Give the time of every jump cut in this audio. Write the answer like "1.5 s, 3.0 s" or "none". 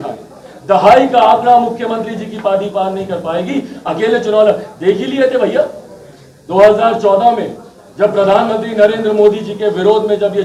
none